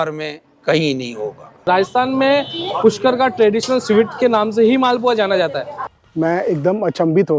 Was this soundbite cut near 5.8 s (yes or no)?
yes